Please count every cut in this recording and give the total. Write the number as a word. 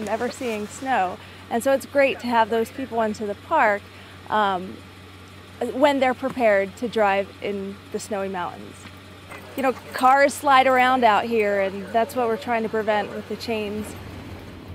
one